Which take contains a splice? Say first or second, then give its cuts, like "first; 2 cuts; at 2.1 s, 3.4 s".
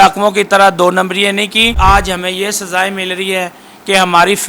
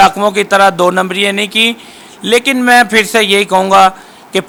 first; 1 cut; at 1.8 s